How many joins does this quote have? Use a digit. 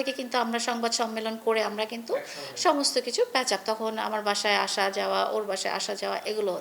0